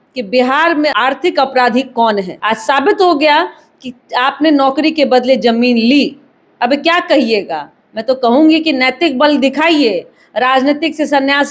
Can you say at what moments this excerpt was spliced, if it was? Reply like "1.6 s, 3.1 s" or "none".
0.9 s, 2.3 s

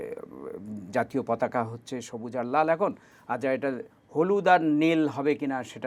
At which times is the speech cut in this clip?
none

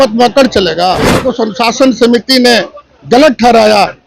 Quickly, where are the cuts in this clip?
1.2 s

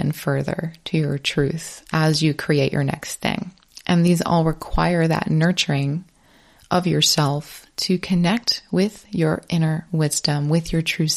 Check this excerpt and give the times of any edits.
none

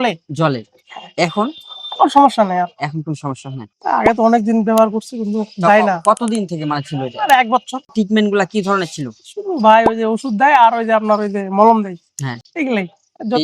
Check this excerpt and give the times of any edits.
3.7 s, 7.9 s

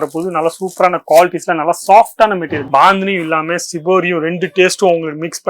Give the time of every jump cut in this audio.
2.5 s

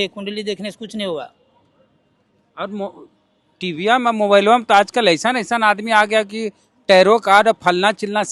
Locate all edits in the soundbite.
none

